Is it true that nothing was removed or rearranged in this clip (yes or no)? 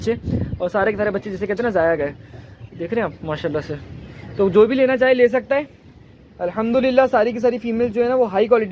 yes